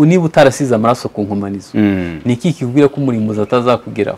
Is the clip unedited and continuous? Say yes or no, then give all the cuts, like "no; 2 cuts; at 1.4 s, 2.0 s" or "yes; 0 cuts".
yes; 0 cuts